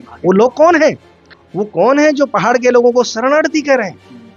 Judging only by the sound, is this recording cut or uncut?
uncut